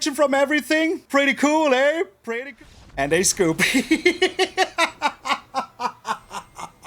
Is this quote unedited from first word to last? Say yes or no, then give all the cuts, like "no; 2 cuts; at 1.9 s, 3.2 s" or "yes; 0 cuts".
no; 2 cuts; at 1.0 s, 2.2 s